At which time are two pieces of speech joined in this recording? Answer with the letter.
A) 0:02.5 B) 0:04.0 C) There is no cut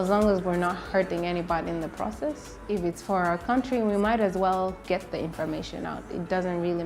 A